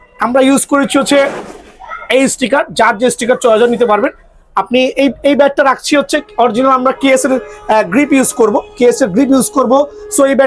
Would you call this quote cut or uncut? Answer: uncut